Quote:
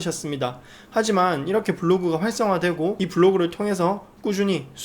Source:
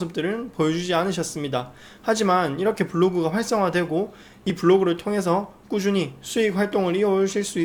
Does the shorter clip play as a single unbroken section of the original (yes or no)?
no